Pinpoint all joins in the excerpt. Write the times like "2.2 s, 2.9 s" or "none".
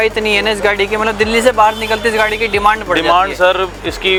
none